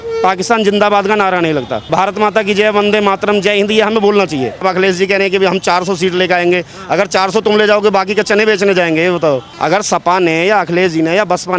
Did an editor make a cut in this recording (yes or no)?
yes